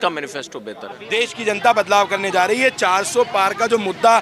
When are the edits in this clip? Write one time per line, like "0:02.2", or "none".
0:01.0